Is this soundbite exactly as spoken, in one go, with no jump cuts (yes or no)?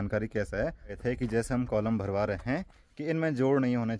no